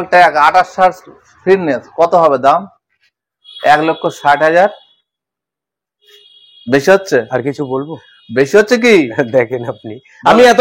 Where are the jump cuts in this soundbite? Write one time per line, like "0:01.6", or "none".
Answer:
none